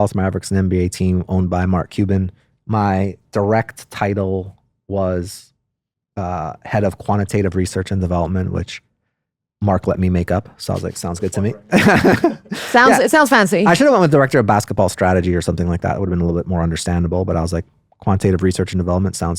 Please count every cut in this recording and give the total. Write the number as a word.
zero